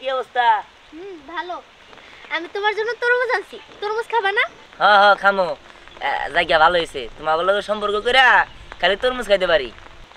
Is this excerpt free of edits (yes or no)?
yes